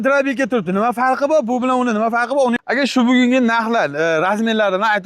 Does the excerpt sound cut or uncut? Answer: cut